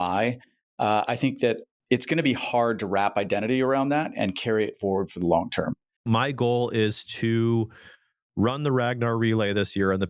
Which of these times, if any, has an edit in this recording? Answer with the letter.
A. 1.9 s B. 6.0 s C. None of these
B